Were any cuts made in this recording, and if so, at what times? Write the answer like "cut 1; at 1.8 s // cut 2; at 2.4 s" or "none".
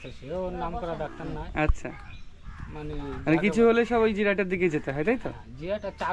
none

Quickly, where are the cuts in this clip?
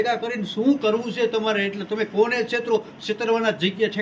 none

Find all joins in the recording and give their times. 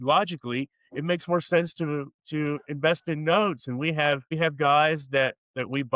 cut 1; at 4.3 s

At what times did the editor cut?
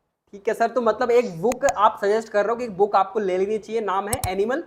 none

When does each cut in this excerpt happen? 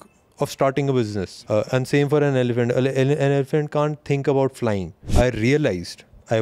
cut 1; at 1.3 s // cut 2; at 5.0 s

